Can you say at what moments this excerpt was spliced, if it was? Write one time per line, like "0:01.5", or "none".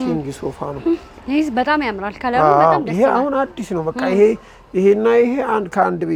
none